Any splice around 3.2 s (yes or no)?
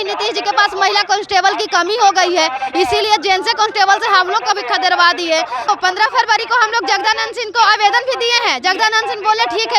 no